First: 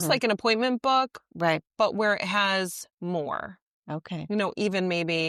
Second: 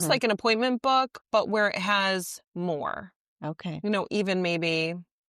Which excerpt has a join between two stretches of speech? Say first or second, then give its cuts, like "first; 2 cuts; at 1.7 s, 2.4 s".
second; 1 cut; at 1.2 s